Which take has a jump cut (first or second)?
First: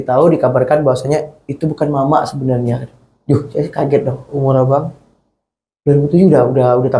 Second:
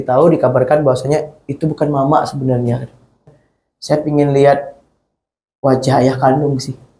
second